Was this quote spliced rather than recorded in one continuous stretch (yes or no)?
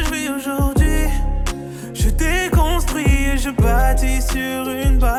no